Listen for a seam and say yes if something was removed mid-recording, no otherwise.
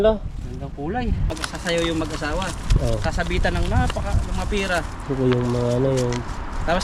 yes